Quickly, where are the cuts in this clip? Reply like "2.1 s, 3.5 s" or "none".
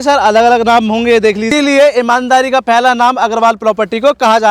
1.5 s